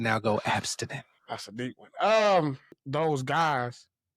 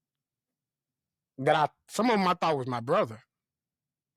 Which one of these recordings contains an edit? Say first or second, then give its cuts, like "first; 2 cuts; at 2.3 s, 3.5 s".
first; 1 cut; at 2.8 s